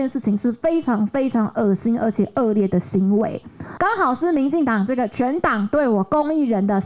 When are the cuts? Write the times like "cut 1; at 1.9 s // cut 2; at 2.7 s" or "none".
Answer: cut 1; at 3.7 s